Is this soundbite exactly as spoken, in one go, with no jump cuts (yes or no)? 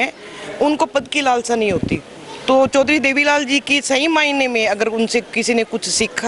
yes